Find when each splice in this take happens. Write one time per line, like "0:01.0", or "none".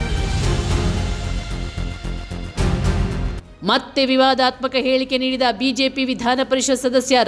none